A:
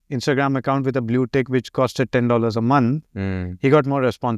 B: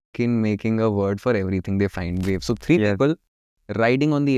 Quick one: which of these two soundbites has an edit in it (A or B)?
B